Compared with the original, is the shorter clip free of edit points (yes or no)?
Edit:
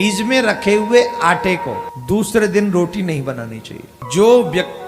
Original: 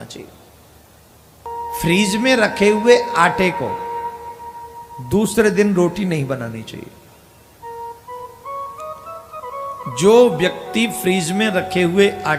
no